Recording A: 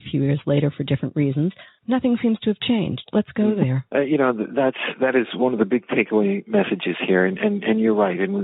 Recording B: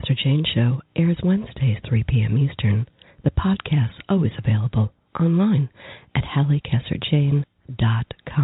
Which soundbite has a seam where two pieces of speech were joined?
A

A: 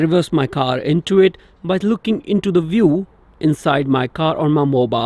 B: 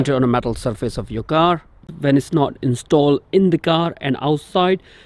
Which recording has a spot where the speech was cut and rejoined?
B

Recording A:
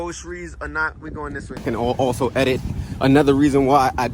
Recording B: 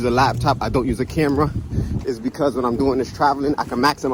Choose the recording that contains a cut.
A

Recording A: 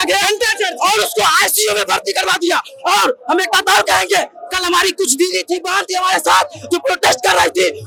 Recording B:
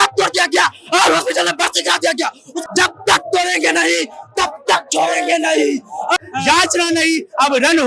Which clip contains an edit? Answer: B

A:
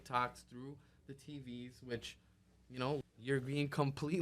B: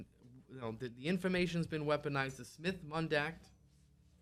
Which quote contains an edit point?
A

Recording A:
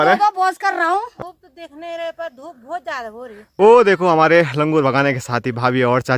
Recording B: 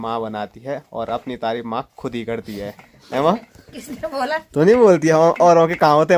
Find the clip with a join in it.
A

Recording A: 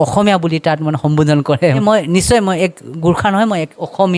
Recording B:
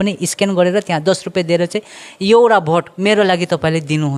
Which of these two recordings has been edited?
A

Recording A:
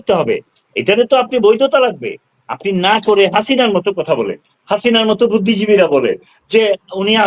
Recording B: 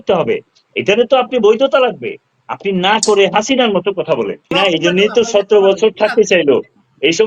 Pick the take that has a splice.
B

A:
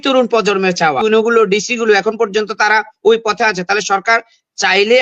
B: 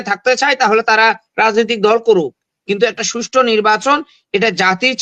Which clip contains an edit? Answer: A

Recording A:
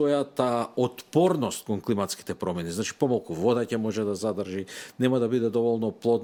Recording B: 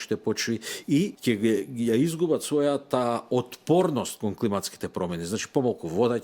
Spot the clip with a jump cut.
B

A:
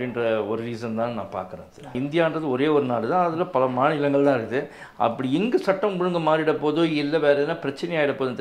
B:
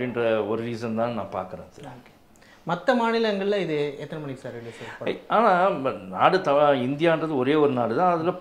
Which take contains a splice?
A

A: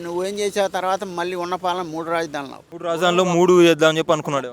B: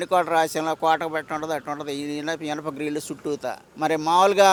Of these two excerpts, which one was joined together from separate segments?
A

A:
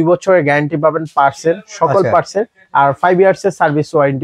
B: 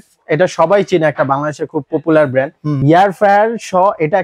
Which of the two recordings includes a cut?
B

